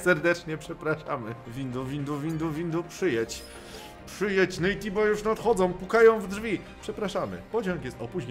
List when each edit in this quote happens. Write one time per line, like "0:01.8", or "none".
0:01.4